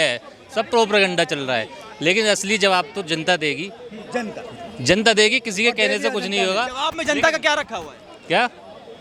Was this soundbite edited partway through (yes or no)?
no